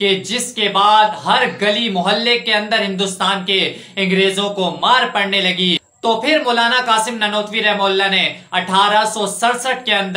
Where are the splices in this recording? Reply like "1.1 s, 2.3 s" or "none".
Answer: 5.8 s